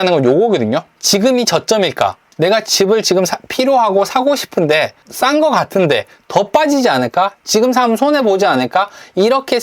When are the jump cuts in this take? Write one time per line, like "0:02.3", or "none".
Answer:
0:00.9
0:02.2